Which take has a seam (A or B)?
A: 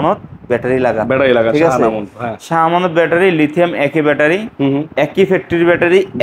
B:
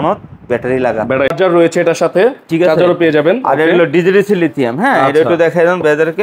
B